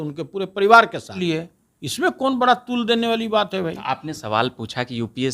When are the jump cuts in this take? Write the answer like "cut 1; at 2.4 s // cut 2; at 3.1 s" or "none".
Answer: cut 1; at 1.2 s